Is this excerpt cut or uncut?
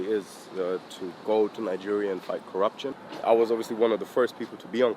cut